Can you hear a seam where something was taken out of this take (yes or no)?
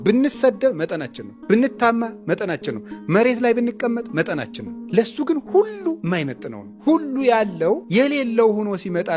no